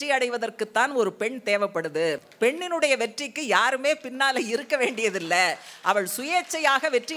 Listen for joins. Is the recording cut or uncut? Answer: cut